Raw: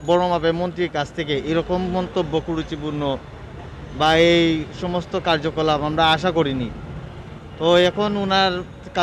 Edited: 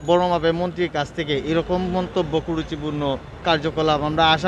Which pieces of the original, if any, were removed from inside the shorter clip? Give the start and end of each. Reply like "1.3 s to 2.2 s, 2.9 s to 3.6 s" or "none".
3.3 s to 5.1 s